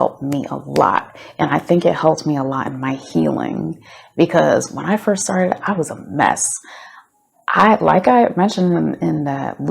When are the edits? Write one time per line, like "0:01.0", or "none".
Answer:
none